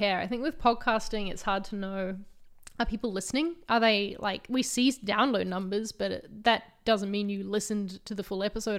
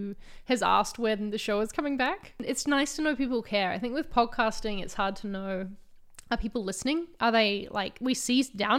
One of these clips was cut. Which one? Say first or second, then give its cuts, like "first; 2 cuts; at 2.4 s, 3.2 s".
second; 1 cut; at 2.4 s